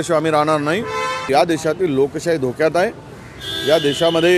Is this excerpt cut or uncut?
cut